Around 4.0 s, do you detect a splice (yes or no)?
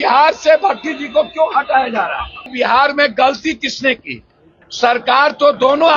no